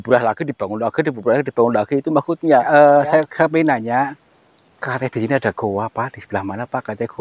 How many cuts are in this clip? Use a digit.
1